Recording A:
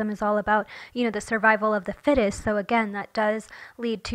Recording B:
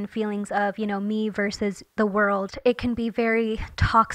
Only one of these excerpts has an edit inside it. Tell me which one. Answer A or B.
B